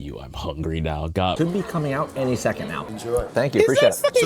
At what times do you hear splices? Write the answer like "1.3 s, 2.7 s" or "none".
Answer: 1.4 s